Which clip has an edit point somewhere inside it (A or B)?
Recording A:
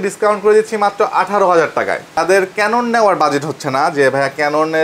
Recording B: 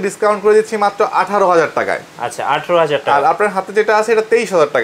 A